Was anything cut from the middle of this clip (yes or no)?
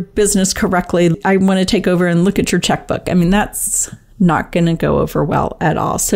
yes